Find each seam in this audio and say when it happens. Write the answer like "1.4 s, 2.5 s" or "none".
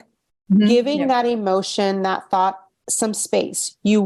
none